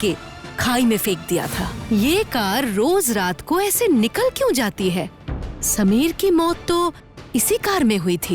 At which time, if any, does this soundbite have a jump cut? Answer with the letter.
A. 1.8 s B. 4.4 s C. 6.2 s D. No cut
A